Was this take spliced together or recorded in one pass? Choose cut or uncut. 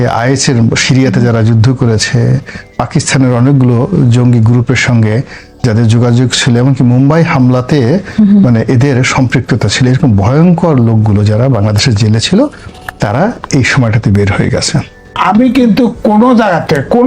cut